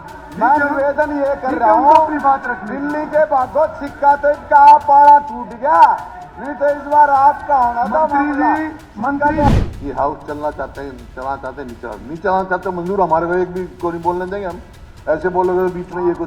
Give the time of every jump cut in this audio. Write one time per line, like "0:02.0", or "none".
0:09.5